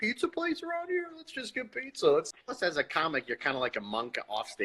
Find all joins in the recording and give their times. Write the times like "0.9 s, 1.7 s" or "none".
2.7 s